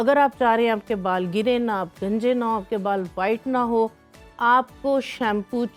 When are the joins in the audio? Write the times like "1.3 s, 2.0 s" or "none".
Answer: none